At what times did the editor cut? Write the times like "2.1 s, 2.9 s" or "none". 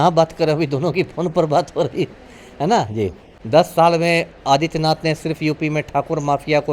3.3 s